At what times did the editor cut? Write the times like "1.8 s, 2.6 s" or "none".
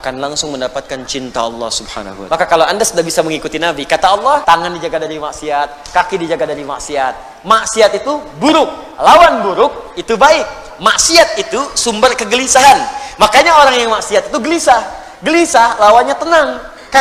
2.1 s, 4.4 s